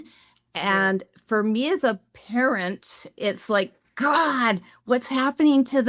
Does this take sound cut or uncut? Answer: uncut